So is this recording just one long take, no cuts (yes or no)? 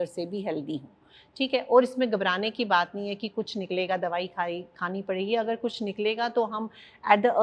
yes